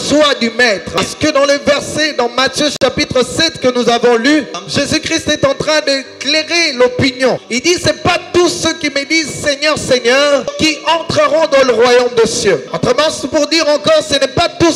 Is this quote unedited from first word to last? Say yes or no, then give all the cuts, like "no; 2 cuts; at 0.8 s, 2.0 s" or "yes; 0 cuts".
no; 5 cuts; at 1.0 s, 4.6 s, 7.5 s, 10.6 s, 12.6 s